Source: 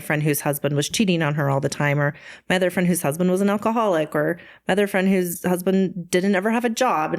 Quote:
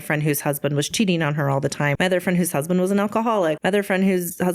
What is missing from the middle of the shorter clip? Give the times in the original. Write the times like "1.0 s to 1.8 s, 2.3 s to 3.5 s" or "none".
1.9 s to 2.4 s, 4.1 s to 4.6 s

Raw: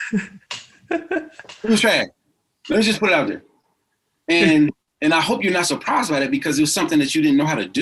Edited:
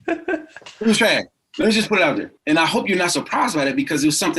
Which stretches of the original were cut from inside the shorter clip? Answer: 2.2 s to 2.5 s, 3.4 s to 4.9 s

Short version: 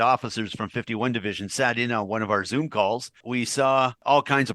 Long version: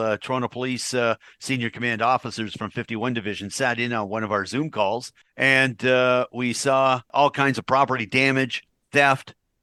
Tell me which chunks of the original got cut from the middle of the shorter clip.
5.3 s to 6.3 s

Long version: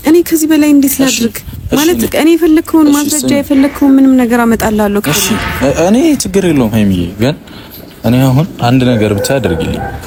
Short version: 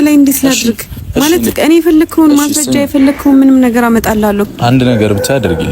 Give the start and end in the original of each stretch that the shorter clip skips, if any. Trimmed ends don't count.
5.1 s to 8.5 s

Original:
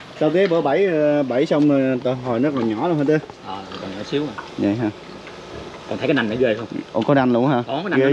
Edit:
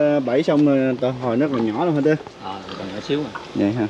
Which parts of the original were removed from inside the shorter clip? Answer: none

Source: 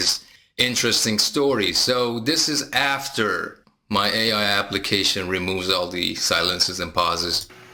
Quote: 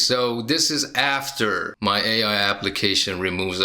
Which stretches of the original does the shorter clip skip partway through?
3.5 s to 3.8 s

